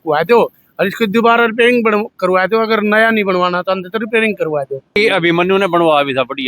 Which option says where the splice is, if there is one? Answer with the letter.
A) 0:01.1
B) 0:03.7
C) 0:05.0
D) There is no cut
C